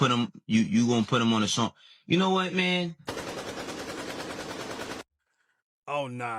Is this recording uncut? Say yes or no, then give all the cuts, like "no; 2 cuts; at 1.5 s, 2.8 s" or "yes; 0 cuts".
yes; 0 cuts